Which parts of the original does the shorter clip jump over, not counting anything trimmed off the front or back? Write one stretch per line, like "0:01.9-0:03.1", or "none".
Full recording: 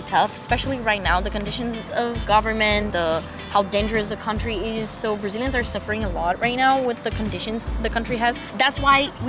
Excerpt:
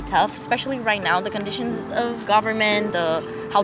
none